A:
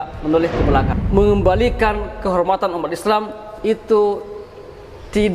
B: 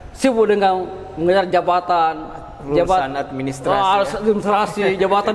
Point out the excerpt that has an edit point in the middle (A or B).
A